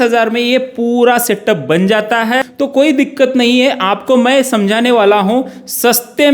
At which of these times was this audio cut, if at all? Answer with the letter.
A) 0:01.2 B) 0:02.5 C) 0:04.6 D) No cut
B